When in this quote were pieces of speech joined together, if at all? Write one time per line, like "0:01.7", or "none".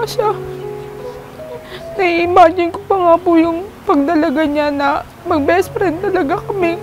0:05.1